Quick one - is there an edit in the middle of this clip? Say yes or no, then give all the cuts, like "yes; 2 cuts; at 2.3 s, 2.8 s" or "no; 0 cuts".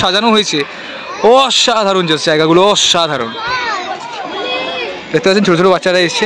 no; 0 cuts